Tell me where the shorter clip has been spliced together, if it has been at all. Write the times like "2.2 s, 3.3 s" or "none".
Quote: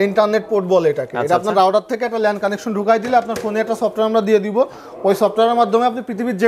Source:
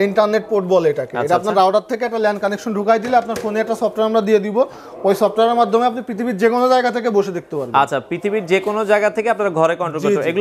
none